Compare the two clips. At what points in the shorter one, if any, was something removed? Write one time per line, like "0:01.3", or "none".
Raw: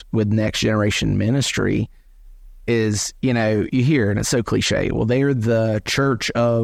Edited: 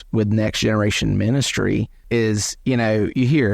0:02.0